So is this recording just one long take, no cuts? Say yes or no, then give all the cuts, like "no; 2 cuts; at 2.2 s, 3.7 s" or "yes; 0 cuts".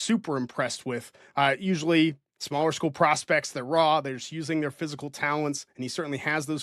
yes; 0 cuts